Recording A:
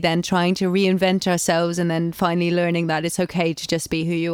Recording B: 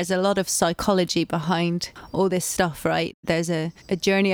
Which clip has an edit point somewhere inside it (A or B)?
B